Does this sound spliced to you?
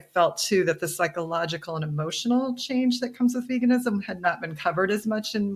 no; 0 cuts

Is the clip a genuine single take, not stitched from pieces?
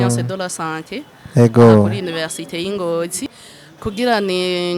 no; 1 cut; at 3.3 s

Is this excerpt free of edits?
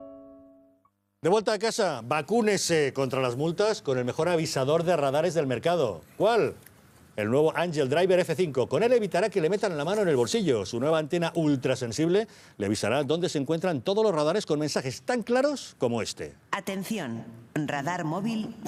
no; 1 cut; at 11.6 s

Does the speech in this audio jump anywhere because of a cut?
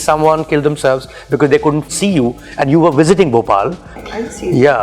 yes; 2 cuts; at 1.9 s, 3.9 s

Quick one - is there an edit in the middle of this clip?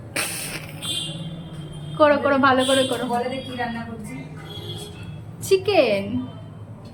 no; 0 cuts

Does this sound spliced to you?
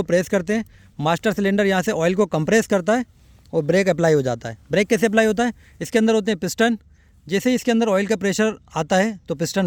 no; 0 cuts

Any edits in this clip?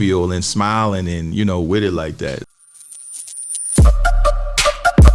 yes; 1 cut; at 2.4 s

